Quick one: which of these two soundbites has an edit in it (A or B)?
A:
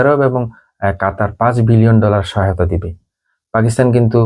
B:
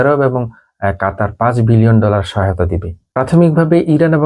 B